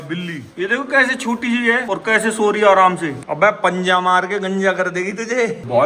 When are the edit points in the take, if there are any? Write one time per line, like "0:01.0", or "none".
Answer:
none